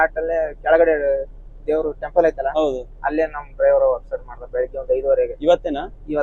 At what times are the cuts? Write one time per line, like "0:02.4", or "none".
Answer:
none